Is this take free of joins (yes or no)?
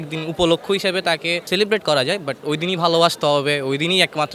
no